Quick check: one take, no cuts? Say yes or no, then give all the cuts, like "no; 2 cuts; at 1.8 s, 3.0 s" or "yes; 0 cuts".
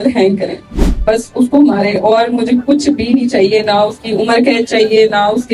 yes; 0 cuts